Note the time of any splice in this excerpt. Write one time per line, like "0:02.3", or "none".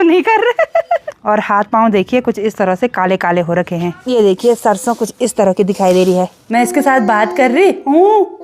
0:01.1
0:04.0
0:06.4